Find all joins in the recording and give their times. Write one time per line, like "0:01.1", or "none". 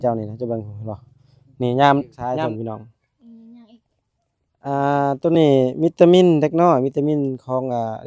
0:02.2